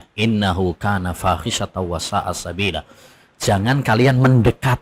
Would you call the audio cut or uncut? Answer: uncut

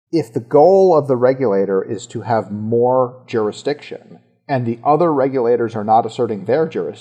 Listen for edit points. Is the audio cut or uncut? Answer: uncut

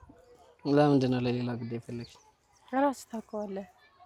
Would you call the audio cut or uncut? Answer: uncut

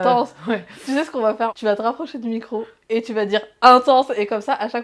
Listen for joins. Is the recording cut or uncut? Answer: cut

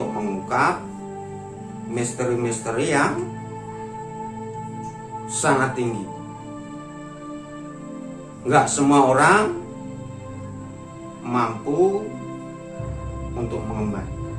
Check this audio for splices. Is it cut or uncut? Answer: uncut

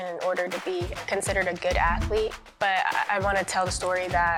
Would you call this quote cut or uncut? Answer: uncut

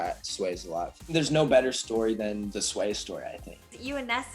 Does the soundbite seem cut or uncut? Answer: cut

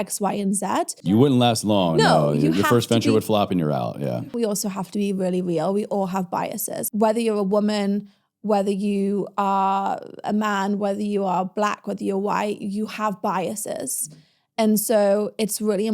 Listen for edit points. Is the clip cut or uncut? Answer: cut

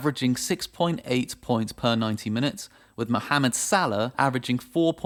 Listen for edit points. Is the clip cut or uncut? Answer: uncut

